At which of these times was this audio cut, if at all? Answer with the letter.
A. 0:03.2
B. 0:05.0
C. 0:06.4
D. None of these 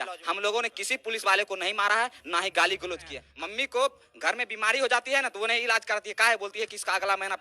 A